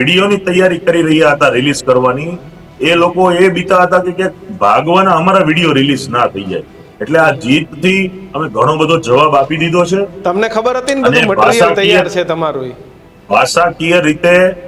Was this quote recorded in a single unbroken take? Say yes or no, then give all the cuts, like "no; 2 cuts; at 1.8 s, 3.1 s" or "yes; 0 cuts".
yes; 0 cuts